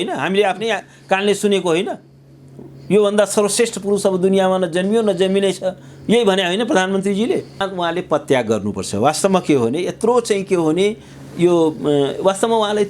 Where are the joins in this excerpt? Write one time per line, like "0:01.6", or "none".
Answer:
0:07.6